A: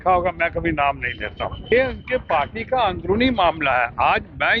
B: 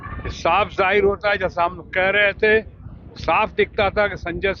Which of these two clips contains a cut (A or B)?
A